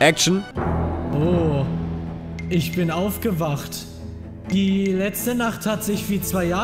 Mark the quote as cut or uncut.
uncut